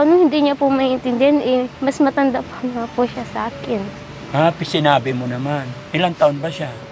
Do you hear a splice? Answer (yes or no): no